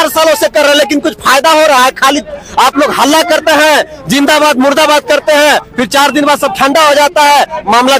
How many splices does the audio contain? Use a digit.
0